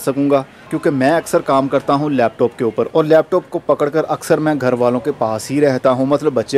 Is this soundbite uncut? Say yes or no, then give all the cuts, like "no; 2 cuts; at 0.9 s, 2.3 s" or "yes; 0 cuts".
yes; 0 cuts